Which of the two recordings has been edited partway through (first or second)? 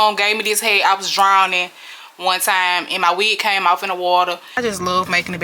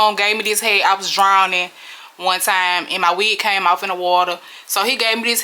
first